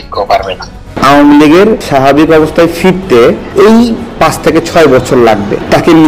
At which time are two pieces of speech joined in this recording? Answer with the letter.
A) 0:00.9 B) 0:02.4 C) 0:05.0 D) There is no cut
A